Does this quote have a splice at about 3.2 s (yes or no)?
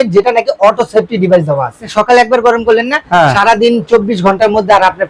no